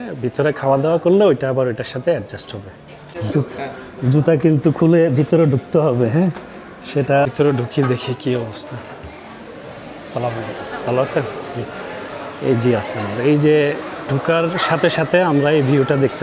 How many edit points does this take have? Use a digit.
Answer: 2